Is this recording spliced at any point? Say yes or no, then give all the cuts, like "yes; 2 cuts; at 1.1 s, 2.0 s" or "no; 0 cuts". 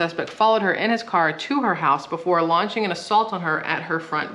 no; 0 cuts